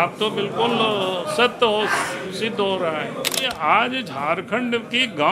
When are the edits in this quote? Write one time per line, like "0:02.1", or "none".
0:03.5